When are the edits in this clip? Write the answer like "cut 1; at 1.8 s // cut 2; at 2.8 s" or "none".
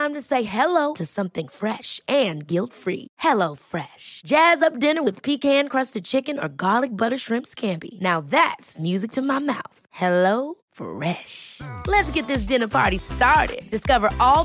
none